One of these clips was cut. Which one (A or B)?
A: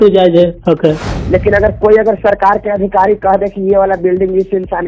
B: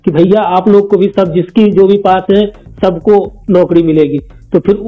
A